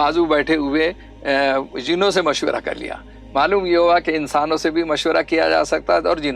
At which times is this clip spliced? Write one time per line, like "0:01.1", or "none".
none